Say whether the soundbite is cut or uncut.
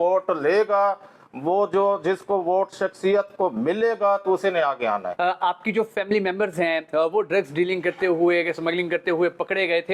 cut